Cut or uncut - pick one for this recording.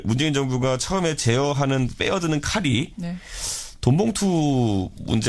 cut